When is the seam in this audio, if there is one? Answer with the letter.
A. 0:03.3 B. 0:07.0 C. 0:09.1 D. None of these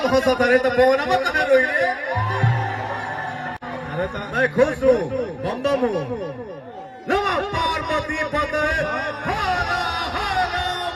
D